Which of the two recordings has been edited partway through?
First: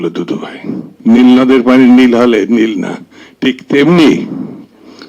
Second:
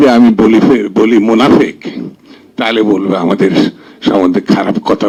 first; 1 cut; at 1.0 s

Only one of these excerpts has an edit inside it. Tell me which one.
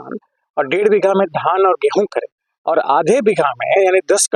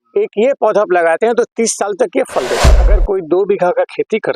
second; 1 cut; at 2.9 s

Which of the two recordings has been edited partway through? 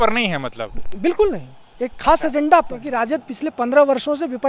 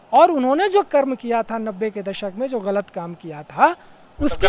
first; 1 cut; at 2.8 s

